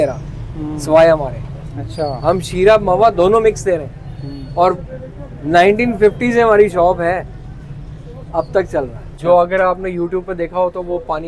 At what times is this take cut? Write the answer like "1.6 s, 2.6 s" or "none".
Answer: 9.0 s